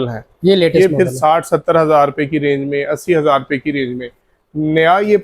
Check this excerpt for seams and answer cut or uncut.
uncut